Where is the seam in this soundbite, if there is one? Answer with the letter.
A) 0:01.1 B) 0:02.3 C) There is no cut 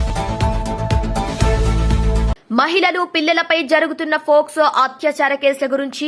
B